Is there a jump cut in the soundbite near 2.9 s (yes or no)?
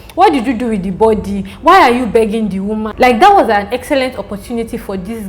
yes